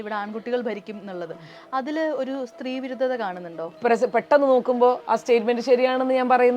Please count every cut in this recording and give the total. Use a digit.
1